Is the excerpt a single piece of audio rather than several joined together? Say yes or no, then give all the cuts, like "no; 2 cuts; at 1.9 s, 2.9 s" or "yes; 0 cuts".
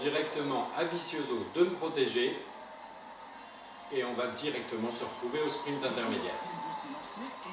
no; 1 cut; at 2.5 s